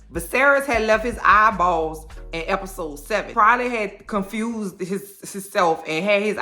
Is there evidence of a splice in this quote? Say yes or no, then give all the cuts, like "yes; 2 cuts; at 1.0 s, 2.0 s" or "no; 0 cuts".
yes; 1 cut; at 3.3 s